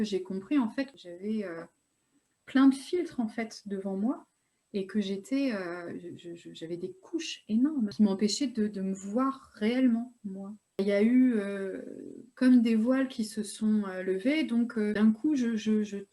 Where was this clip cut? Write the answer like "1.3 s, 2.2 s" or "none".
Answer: 1.0 s, 7.9 s, 10.8 s, 14.9 s